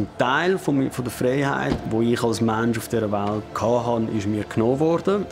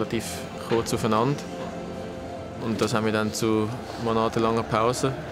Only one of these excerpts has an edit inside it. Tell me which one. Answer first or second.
first